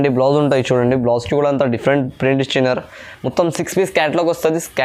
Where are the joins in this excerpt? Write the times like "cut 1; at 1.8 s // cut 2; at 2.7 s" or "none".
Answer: none